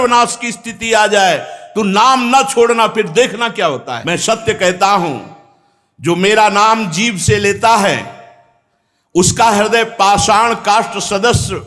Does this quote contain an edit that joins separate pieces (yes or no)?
yes